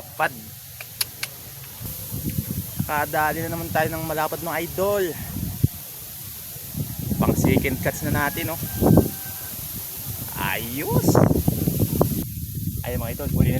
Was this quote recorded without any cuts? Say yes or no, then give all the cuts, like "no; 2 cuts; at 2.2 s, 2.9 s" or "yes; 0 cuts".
no; 2 cuts; at 1.9 s, 12.2 s